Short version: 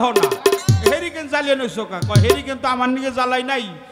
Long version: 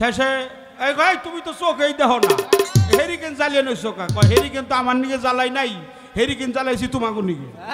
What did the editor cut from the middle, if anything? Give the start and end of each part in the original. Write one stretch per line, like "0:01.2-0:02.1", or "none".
none